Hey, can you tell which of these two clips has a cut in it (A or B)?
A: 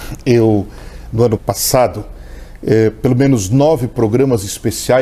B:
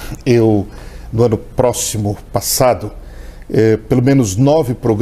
A